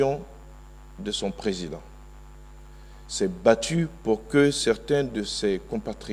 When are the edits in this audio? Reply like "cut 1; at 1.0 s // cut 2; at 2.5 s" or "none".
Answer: none